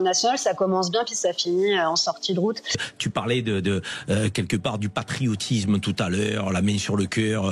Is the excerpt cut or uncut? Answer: cut